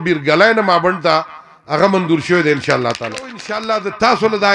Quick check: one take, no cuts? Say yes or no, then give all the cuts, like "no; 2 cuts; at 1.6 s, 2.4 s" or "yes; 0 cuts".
no; 1 cut; at 3.5 s